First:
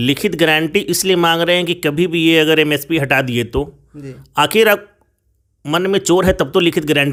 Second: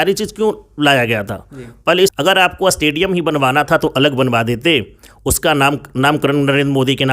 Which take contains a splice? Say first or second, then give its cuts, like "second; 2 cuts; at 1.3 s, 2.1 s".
second; 1 cut; at 2.1 s